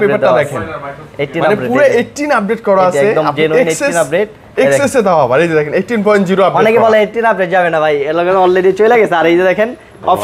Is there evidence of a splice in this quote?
no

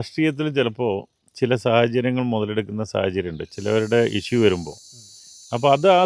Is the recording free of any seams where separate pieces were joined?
yes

